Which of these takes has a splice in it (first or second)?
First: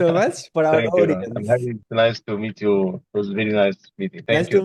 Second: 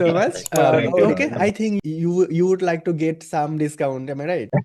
second